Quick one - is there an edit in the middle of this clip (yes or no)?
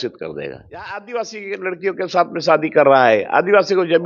yes